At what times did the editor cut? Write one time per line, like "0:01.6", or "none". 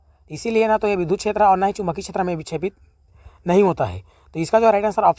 none